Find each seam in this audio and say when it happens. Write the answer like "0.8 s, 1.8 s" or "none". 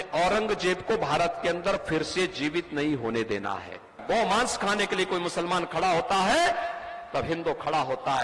4.0 s

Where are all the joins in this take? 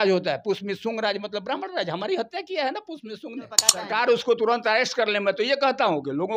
3.8 s

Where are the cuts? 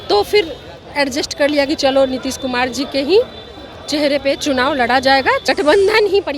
5.4 s

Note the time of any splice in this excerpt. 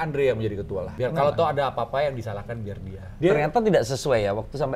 0.9 s, 3.1 s

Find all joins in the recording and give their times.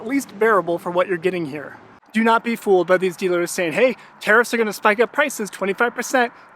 2.0 s

